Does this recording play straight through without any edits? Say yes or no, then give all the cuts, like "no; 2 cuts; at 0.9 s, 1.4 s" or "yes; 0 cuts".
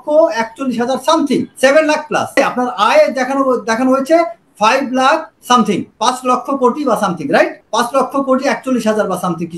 no; 4 cuts; at 1.5 s, 2.3 s, 5.6 s, 7.6 s